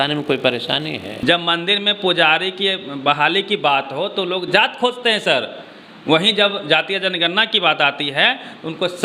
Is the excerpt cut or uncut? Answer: cut